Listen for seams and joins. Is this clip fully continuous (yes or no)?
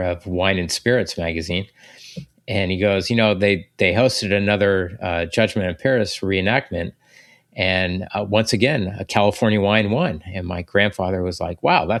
yes